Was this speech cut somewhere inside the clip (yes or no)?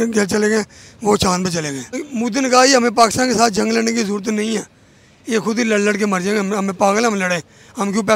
yes